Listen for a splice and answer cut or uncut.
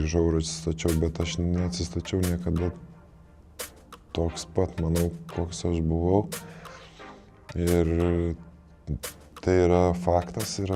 uncut